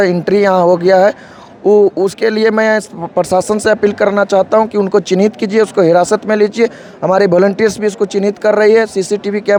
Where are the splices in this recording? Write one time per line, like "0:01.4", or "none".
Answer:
none

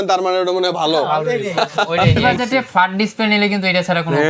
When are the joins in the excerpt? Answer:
0:02.2

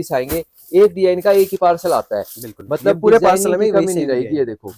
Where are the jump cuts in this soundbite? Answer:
none

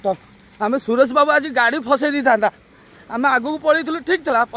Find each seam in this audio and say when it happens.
none

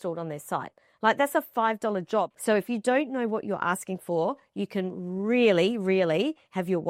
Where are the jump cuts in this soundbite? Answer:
0:02.3

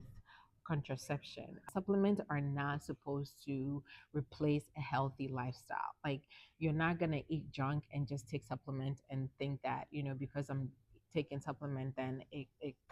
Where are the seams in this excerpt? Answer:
0:01.7

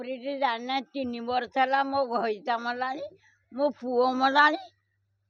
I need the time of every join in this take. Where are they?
none

